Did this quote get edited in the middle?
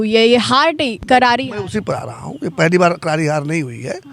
no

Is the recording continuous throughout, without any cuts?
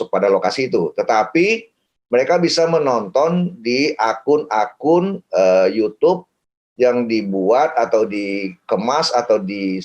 yes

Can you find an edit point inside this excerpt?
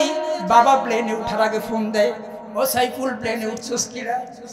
no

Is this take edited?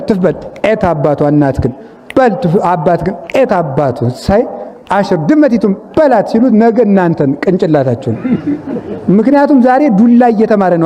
no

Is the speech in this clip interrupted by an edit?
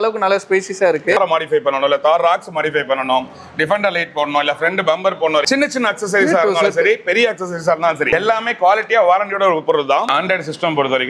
yes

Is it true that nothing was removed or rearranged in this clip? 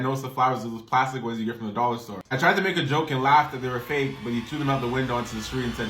no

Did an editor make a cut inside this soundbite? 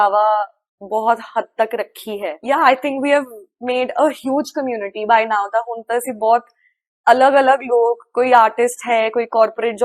yes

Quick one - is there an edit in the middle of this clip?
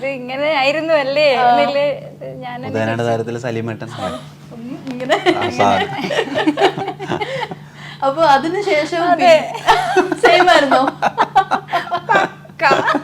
no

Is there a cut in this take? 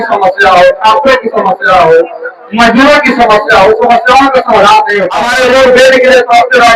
yes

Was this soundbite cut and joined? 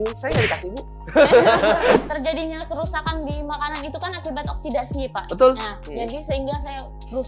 yes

